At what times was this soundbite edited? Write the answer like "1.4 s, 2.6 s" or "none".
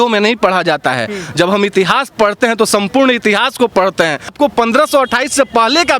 4.3 s

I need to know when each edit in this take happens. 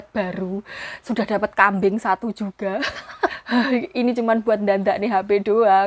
3.4 s

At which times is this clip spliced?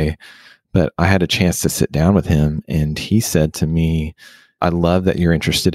4.4 s

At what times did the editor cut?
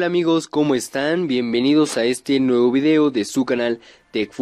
none

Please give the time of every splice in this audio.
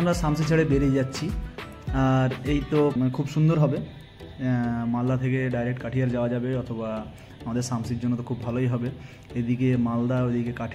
2.9 s

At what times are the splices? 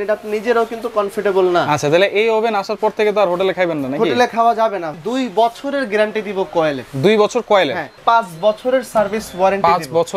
4.9 s, 8.0 s

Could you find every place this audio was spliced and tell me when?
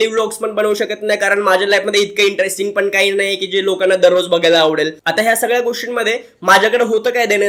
none

